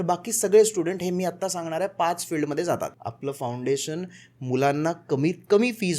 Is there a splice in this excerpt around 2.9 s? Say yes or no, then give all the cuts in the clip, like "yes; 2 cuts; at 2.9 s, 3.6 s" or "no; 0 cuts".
yes; 1 cut; at 2.9 s